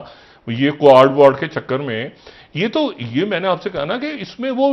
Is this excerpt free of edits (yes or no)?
yes